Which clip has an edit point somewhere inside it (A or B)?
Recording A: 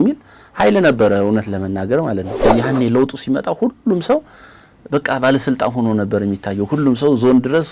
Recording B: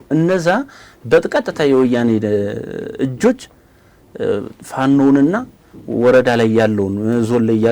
A